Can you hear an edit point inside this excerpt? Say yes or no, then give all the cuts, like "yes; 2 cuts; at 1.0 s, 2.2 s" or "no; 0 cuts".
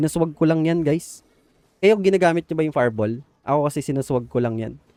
no; 0 cuts